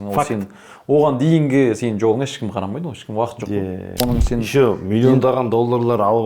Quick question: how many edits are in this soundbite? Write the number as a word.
one